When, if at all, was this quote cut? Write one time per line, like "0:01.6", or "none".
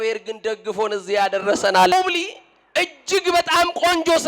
0:01.9

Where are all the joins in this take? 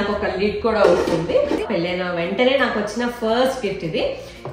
0:01.6

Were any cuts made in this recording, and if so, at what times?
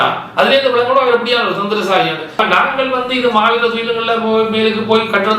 0:02.4

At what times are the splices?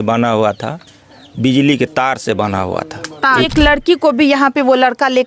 0:03.5

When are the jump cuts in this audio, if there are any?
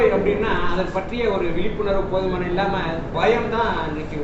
none

